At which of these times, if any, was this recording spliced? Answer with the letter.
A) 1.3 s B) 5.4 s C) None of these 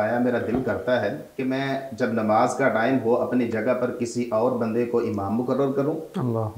A